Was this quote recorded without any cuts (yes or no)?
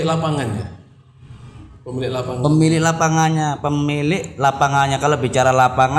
yes